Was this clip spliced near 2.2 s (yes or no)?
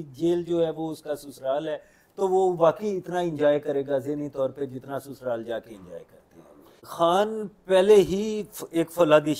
no